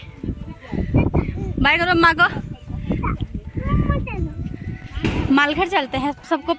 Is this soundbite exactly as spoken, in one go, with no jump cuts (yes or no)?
yes